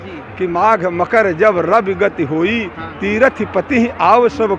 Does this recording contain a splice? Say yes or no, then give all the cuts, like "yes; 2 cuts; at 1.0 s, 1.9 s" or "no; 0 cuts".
no; 0 cuts